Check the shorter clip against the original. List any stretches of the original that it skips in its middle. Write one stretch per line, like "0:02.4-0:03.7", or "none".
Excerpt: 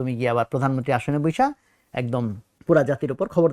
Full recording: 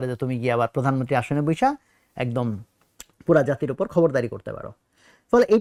0:02.7-0:03.1